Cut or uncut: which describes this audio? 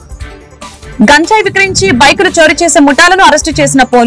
cut